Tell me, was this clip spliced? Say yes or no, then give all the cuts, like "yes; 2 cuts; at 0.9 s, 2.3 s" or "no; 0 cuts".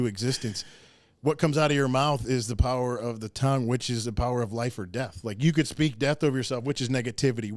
no; 0 cuts